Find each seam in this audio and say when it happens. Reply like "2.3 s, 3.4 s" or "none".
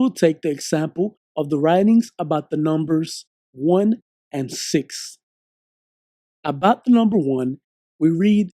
2.5 s